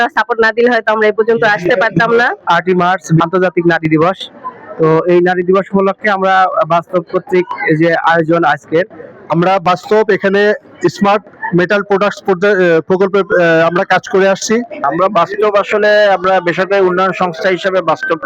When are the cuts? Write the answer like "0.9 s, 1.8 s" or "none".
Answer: 2.5 s, 8.9 s, 14.7 s